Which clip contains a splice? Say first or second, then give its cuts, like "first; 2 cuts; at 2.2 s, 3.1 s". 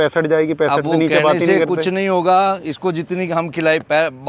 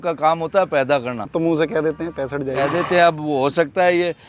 second; 1 cut; at 1.3 s